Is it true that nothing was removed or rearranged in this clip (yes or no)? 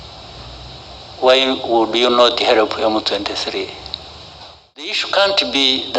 no